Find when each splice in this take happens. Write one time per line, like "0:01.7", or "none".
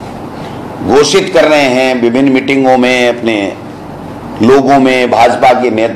none